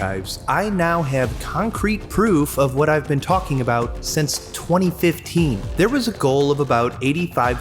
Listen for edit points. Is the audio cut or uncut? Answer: cut